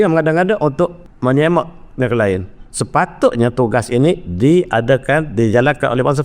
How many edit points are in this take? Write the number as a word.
one